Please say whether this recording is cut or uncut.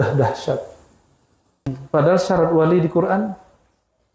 cut